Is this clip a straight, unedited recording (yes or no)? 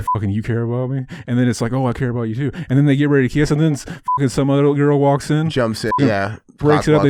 yes